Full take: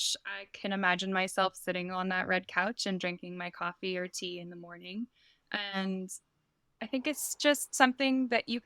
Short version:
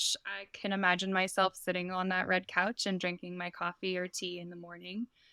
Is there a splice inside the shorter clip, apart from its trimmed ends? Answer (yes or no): no